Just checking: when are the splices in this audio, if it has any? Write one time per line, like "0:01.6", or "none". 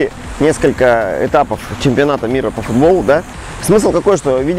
none